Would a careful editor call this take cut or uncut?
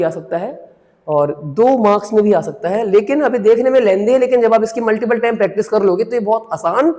uncut